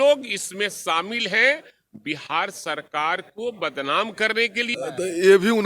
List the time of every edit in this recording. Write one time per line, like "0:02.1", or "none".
0:04.7